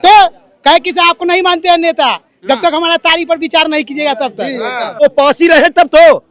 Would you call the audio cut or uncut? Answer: cut